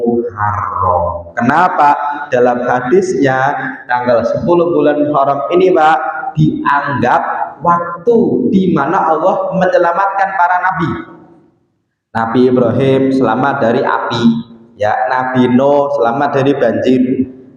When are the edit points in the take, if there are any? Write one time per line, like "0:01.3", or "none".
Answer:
none